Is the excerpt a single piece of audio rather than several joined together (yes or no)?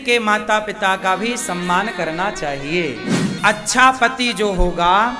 no